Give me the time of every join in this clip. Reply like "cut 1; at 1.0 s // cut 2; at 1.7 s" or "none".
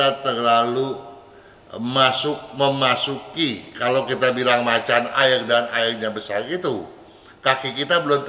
none